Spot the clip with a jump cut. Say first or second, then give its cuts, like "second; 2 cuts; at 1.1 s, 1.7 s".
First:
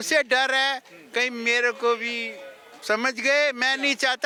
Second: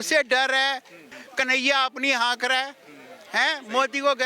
second; 1 cut; at 1.0 s